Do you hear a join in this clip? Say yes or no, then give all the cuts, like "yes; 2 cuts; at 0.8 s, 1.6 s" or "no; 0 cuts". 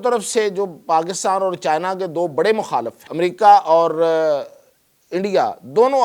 yes; 1 cut; at 3.0 s